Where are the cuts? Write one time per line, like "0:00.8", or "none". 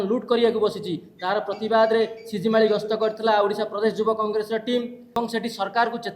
0:05.1